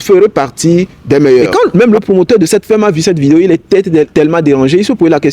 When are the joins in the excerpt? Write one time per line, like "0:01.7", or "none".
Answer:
0:01.5